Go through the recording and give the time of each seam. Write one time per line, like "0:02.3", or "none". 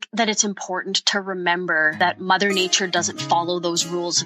0:02.0